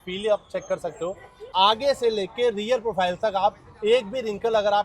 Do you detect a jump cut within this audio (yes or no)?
yes